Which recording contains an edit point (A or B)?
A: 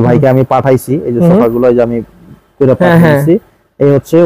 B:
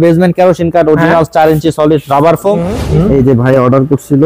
B